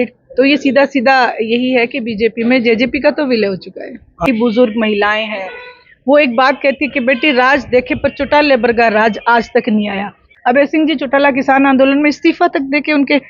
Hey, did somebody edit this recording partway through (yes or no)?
yes